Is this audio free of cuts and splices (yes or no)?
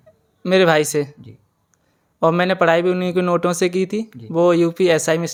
yes